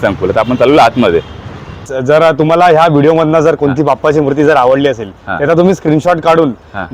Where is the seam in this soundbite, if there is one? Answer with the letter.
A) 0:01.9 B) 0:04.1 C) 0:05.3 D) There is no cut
A